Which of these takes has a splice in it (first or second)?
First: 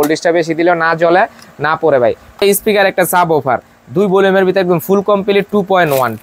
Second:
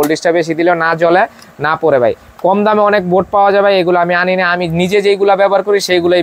first